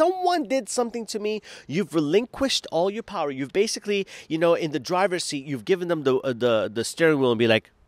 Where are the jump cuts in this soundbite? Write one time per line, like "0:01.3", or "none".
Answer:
none